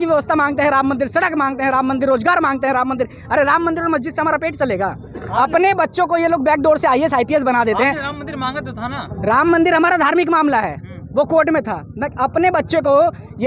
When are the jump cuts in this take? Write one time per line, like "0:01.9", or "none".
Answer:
none